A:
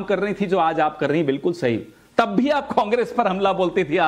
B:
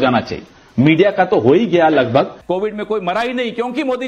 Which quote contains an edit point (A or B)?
B